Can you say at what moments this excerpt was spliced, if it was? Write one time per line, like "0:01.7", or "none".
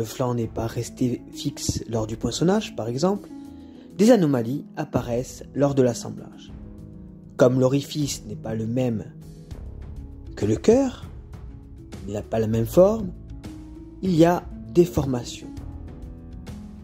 0:15.9